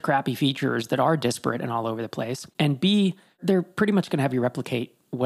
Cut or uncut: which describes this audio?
uncut